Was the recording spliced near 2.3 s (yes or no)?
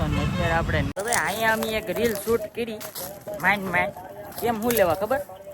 no